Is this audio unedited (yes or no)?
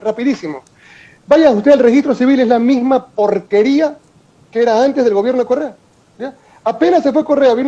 yes